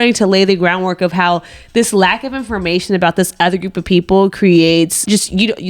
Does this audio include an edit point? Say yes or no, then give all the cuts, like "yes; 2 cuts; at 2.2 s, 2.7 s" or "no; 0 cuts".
no; 0 cuts